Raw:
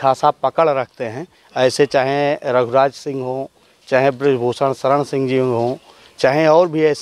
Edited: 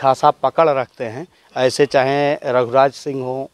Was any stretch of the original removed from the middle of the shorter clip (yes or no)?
no